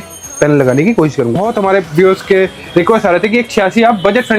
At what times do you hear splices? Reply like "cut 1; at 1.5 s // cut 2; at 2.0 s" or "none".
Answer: cut 1; at 1.4 s